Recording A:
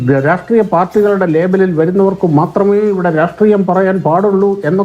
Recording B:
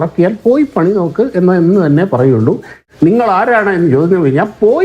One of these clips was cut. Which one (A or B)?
B